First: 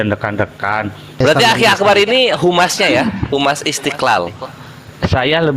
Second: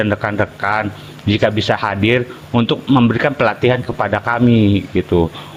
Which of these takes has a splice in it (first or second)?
first